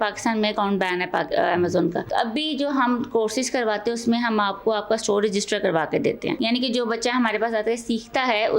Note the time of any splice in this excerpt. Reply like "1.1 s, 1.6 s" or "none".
2.0 s, 6.4 s